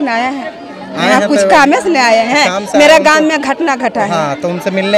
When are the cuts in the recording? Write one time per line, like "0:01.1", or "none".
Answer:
none